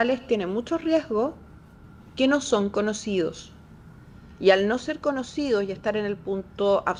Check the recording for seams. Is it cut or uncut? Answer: uncut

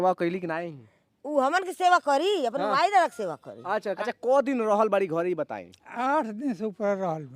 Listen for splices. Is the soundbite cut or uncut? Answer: cut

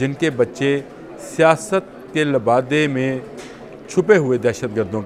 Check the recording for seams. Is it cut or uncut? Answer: uncut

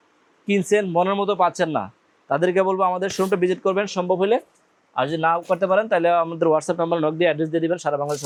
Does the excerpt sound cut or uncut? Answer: uncut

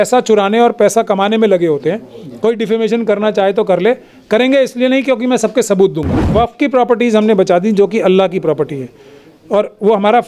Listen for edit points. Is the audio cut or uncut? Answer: cut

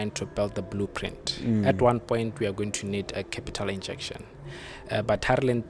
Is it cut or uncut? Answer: uncut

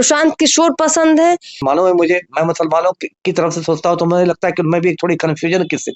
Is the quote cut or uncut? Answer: cut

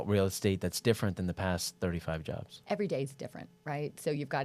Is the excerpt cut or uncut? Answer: cut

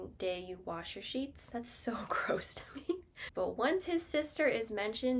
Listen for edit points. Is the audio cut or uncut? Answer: cut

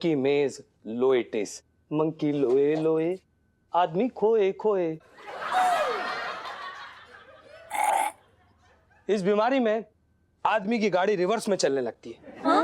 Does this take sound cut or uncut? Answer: uncut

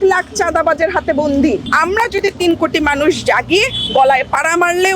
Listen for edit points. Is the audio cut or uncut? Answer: cut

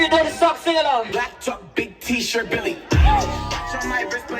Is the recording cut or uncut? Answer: cut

